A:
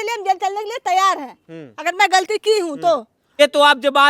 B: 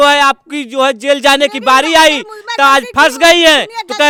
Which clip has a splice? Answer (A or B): A